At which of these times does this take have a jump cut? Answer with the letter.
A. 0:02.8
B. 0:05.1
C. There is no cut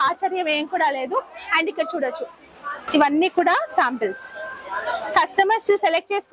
A